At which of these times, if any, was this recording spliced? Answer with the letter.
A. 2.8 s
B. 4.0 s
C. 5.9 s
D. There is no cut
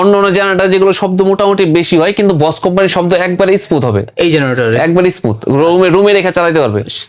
D